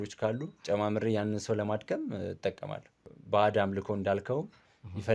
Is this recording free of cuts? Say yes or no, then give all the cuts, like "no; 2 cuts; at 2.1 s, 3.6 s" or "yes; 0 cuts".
no; 1 cut; at 3.1 s